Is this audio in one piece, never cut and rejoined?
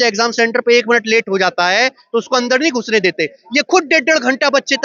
yes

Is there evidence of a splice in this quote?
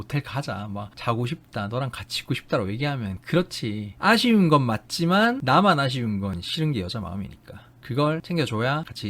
yes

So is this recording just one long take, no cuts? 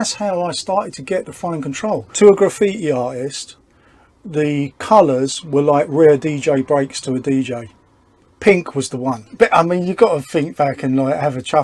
no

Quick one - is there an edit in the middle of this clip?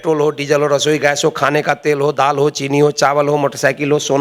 no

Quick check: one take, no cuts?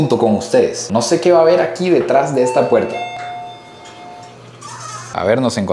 yes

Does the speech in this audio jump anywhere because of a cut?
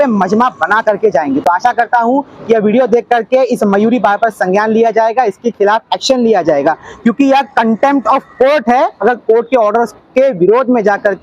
no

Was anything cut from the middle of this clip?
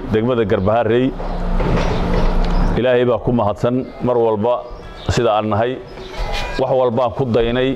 yes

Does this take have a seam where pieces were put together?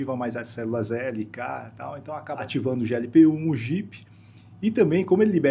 yes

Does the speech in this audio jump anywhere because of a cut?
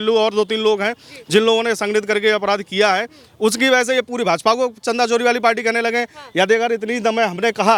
no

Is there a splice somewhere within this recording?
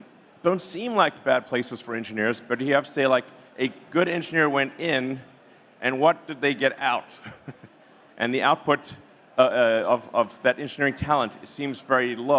no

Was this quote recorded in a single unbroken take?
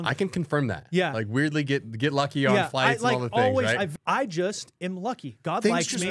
no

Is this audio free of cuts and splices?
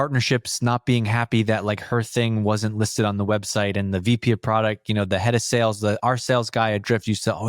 yes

